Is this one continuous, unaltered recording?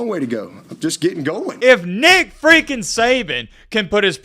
no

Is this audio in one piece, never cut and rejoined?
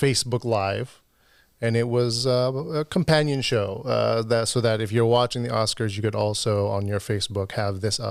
yes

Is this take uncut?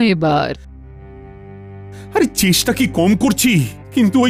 yes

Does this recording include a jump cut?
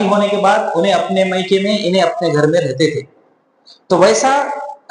no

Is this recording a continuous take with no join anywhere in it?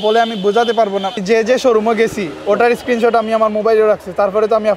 no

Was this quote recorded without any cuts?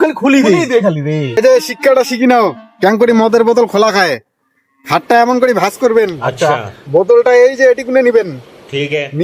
no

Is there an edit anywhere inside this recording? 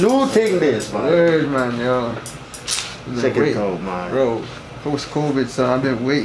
no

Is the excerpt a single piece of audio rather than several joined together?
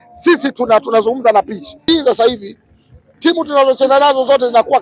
no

